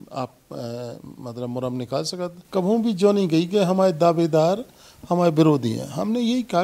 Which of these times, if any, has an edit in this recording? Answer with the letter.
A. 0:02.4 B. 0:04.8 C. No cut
A